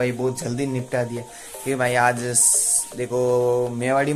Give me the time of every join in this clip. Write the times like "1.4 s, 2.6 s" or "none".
none